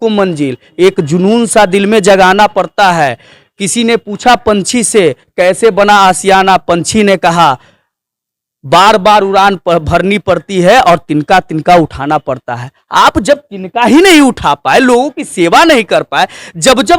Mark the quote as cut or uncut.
uncut